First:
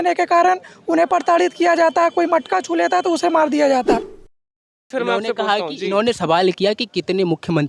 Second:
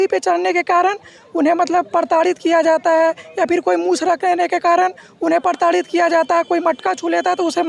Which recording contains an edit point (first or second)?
first